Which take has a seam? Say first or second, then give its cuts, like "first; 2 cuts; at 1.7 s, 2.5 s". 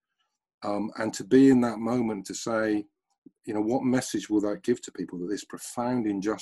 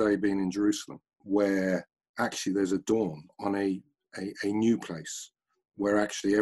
second; 2 cuts; at 1.1 s, 3.3 s